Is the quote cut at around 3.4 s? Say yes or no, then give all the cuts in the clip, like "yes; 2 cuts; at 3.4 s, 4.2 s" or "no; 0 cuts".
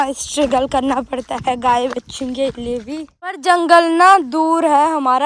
yes; 1 cut; at 3.4 s